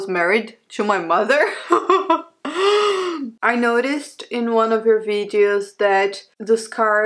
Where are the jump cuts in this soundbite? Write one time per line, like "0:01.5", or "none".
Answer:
0:03.3